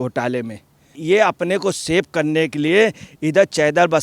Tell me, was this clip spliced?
yes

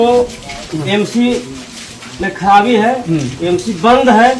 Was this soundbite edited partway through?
no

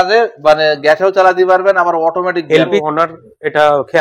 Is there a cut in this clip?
yes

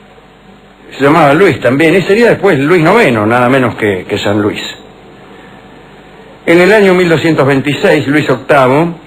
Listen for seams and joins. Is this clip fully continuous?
no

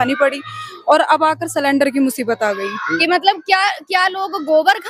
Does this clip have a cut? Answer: yes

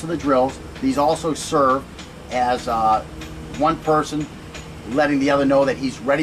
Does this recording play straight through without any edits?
yes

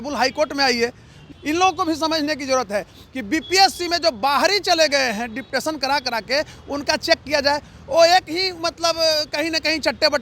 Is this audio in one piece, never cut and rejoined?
no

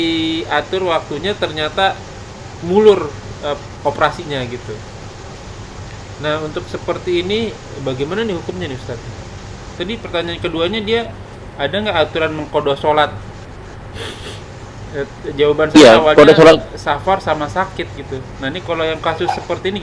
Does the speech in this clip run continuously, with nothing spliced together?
no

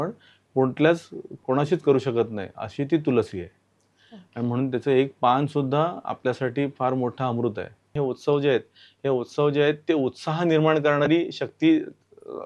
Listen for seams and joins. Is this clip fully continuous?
no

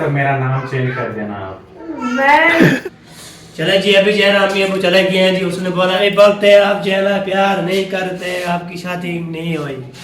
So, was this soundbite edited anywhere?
yes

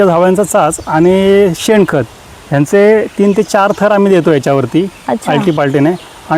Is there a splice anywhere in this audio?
no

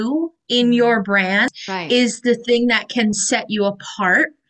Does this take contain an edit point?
yes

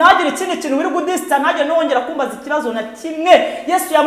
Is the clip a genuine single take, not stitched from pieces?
yes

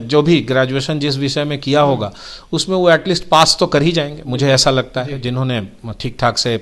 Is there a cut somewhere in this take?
no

